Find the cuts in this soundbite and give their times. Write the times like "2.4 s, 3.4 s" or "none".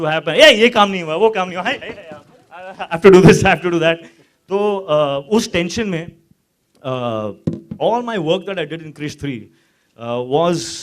1.4 s